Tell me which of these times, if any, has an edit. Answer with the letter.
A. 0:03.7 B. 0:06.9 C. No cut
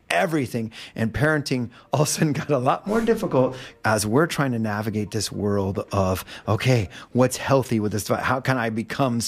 A